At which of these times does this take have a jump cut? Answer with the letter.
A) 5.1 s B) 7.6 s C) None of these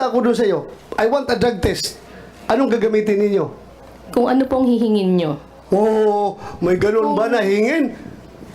B